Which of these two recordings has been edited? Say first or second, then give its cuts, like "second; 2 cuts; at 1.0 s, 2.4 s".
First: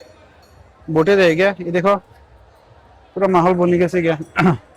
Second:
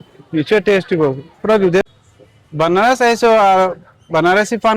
second; 1 cut; at 1.8 s